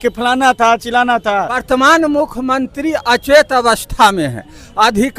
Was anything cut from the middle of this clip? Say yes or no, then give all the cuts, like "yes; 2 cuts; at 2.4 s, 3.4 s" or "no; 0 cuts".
yes; 1 cut; at 1.6 s